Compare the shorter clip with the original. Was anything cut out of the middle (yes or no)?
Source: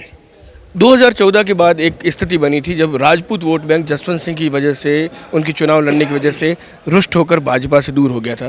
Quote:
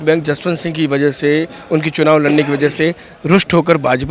no